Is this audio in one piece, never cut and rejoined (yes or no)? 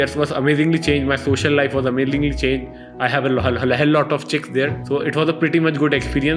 yes